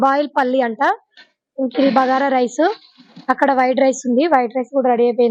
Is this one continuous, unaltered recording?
yes; 0 cuts

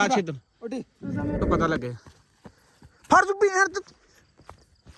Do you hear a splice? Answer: yes; 1 cut; at 1.4 s

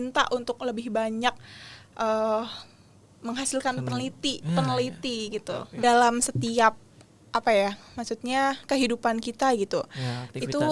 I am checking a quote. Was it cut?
yes; 1 cut; at 5.8 s

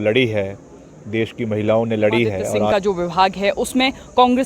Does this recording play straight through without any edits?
no; 1 cut; at 2.7 s

